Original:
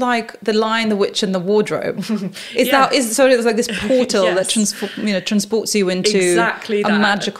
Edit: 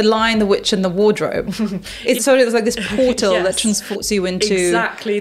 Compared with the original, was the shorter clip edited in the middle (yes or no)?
yes